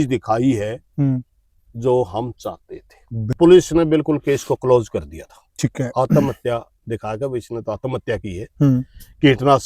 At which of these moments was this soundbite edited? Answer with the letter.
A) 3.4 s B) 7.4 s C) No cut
A